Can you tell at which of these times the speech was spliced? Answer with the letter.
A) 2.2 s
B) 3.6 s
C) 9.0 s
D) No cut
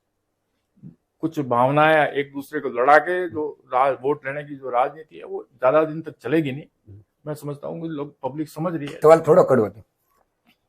C